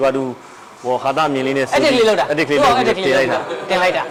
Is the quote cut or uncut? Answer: uncut